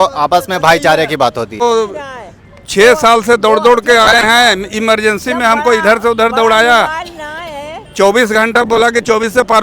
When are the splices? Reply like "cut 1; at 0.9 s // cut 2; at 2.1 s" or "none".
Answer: cut 1; at 1.6 s